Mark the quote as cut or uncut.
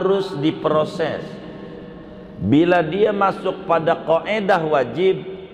uncut